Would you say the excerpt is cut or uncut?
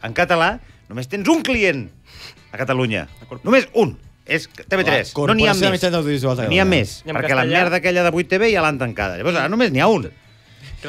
uncut